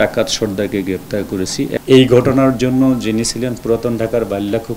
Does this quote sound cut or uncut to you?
cut